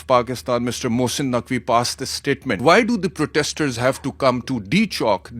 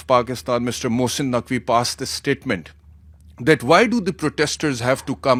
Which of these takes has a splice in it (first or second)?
first